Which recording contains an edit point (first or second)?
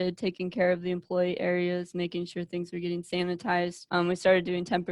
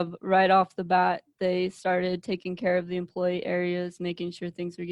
first